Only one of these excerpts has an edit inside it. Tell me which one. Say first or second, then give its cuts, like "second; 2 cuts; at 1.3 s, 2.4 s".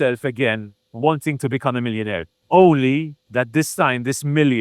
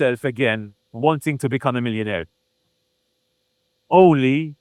first; 2 cuts; at 2.3 s, 3.2 s